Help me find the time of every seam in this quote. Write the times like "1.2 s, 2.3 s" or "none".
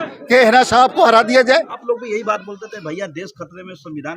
1.7 s